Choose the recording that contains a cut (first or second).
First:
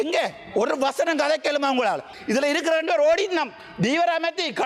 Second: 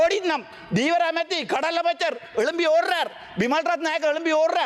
first